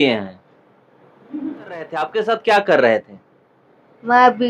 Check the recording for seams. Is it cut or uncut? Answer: cut